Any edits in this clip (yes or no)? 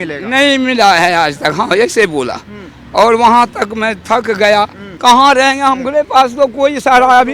yes